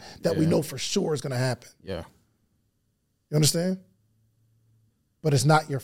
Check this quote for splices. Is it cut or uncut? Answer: uncut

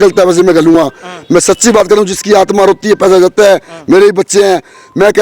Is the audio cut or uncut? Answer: uncut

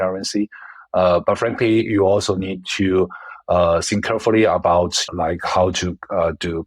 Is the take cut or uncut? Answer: cut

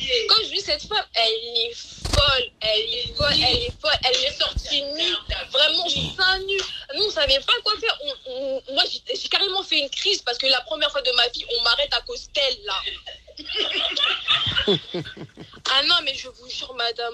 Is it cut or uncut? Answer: uncut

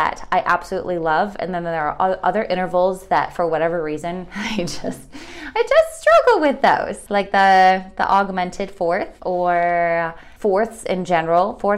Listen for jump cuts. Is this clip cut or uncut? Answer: cut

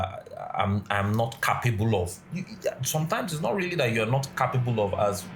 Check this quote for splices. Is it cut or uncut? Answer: uncut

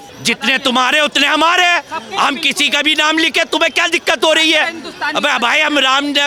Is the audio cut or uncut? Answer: uncut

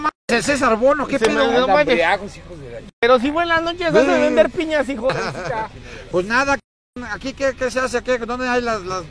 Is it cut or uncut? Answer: cut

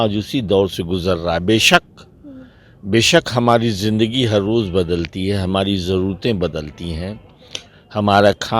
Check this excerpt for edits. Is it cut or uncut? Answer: uncut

